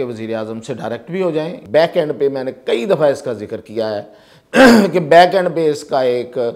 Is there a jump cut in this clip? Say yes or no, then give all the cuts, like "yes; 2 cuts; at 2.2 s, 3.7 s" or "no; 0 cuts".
yes; 1 cut; at 1.6 s